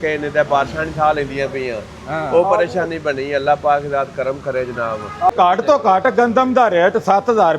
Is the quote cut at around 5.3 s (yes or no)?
yes